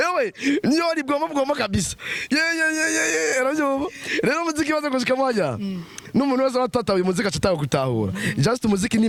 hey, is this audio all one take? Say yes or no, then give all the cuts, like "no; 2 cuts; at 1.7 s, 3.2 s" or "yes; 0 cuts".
yes; 0 cuts